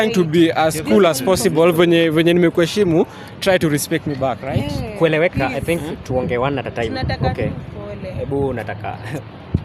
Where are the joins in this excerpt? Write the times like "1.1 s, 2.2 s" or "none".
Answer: none